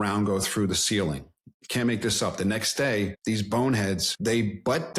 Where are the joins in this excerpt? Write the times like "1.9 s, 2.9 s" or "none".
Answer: 3.2 s, 4.1 s